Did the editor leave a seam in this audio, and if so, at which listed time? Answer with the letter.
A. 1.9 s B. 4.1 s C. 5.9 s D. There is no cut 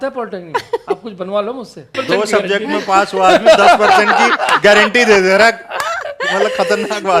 A